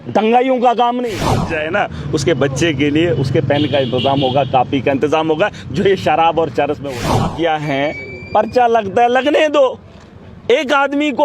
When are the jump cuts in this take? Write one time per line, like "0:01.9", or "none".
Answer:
0:01.5
0:07.0

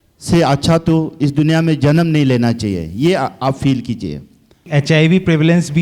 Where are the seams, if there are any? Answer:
0:04.7

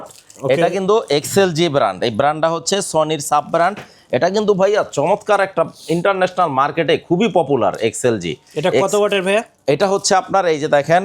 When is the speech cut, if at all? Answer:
none

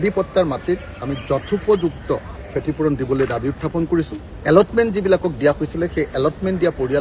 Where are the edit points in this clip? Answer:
0:02.3

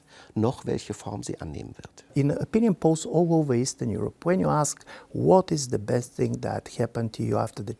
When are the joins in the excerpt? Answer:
0:02.1

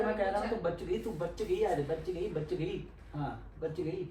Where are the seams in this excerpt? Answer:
0:02.9

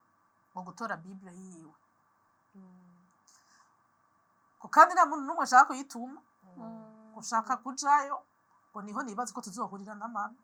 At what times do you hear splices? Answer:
none

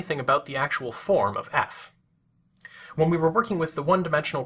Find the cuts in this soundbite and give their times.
0:01.2

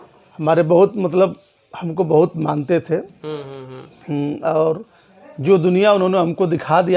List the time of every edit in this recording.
none

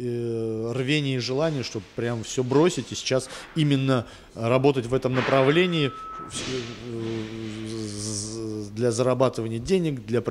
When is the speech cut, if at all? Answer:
none

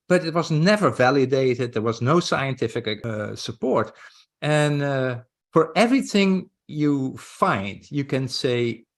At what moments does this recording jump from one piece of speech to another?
0:03.0

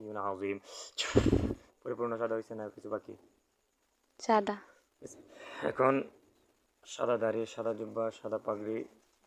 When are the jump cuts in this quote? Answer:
none

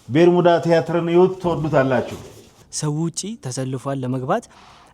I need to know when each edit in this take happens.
0:02.5

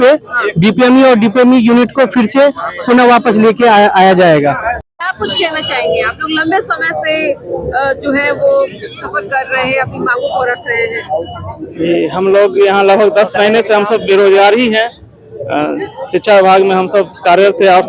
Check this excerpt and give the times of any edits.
none

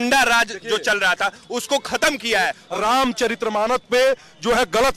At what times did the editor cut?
0:02.6

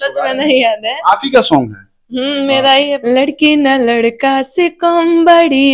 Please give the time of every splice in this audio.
0:03.0

